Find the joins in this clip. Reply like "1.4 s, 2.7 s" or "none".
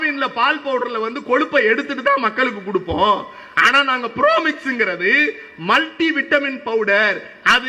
none